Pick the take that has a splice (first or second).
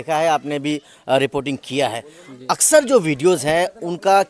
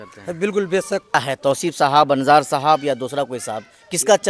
second